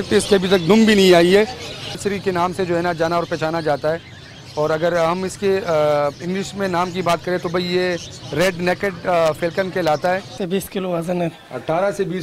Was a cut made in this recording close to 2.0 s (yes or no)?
yes